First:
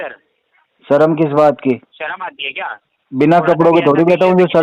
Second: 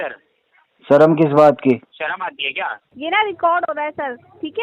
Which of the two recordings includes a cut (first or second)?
second